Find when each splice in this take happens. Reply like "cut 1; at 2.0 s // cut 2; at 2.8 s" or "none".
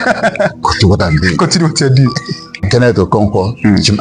cut 1; at 2.6 s